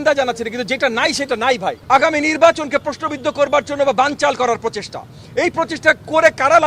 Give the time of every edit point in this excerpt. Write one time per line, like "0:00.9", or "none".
0:01.8